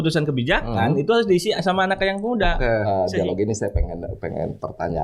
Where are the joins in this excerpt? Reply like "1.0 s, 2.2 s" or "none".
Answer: 2.8 s